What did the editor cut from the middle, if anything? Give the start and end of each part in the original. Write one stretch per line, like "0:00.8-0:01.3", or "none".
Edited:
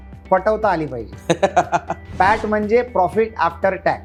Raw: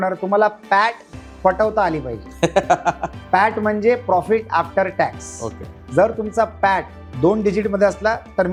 none

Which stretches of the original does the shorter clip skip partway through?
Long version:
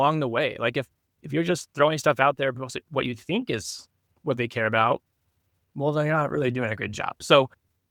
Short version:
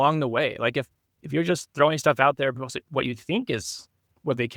none

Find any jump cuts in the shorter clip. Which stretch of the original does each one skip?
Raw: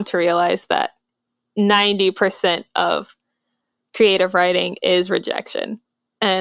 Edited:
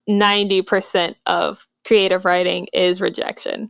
0:03.2-0:03.8

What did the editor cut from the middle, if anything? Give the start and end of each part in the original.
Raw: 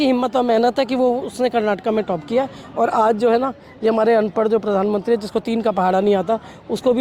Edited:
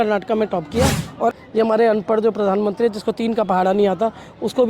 0:02.9-0:03.6

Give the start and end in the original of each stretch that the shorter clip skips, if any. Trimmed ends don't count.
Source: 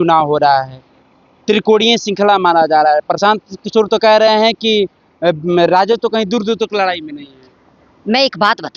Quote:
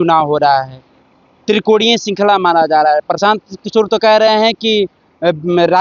none

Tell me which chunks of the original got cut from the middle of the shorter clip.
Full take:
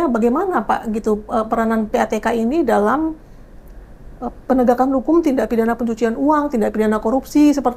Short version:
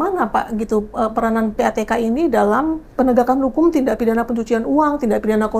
0:03.2-0:04.4

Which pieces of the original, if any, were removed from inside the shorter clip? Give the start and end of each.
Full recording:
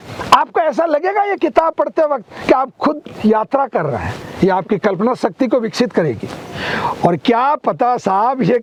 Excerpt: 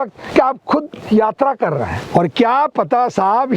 0:04.2-0:06.9

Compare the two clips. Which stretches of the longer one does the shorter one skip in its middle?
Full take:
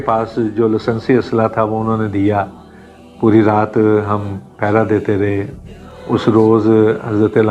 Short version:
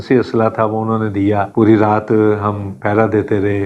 0:02.5-0:03.1
0:04.4-0:04.5

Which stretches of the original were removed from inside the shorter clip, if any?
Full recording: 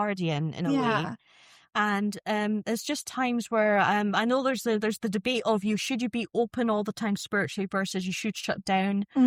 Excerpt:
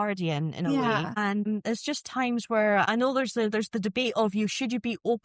0:01.4-0:02.4
0:03.9-0:04.1

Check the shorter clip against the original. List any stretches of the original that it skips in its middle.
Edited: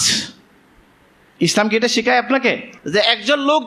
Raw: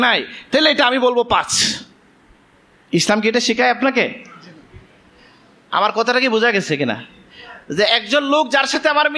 0:04.2-0:07.6

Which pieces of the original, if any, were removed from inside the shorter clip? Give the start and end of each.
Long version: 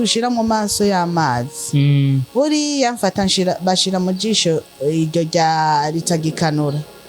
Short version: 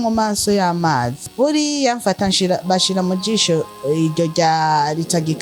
0:01.6-0:02.2

